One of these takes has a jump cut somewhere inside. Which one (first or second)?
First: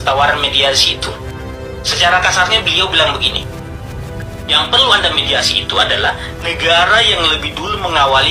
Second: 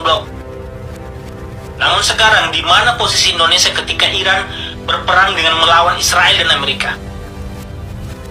second